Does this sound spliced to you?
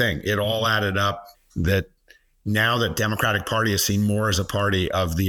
no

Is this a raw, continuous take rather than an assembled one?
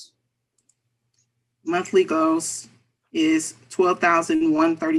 yes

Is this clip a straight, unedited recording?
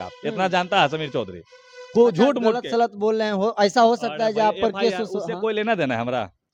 yes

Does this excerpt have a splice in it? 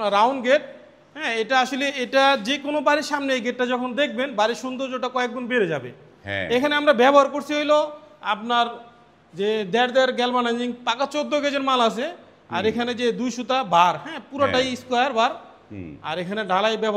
no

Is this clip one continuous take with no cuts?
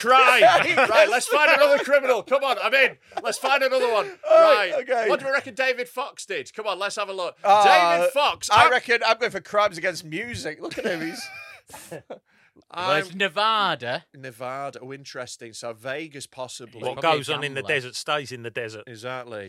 yes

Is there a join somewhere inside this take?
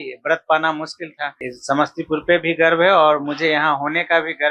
yes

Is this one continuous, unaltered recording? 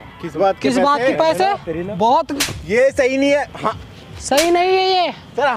no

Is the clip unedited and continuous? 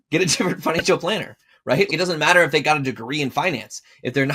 no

